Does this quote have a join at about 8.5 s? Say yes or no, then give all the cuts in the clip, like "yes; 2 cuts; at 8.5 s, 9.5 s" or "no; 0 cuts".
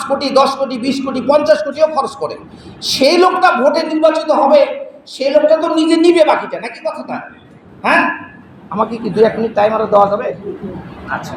no; 0 cuts